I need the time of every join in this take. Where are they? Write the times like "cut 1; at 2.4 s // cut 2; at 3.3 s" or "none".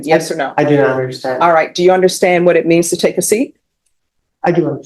none